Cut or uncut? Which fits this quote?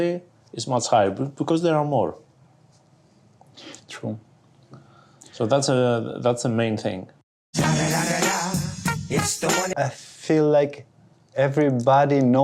cut